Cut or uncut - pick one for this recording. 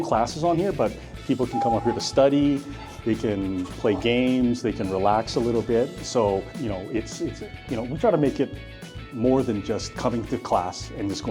uncut